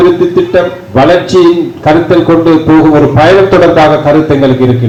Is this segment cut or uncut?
uncut